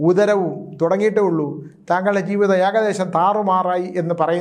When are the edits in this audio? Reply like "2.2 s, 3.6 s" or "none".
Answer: none